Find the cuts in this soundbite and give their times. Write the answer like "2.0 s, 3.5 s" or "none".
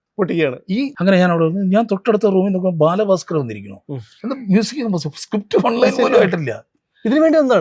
0.9 s